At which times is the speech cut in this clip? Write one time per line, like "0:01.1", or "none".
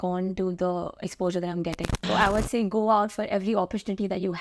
0:02.1